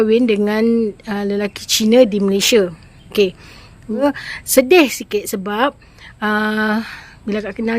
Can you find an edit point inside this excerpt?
yes; 1 cut; at 4.0 s

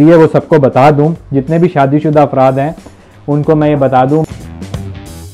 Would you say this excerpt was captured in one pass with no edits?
no; 1 cut; at 4.2 s

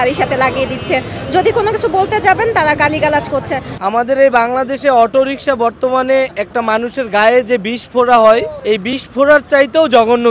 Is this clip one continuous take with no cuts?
no; 2 cuts; at 3.7 s, 8.5 s

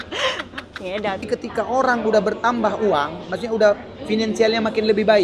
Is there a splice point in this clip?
yes; 1 cut; at 1.2 s

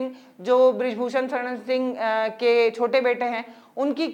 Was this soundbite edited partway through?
no; 0 cuts

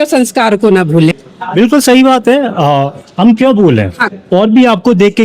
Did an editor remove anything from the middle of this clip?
yes; 2 cuts; at 1.1 s, 4.0 s

